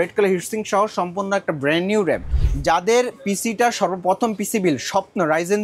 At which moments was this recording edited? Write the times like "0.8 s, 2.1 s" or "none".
2.3 s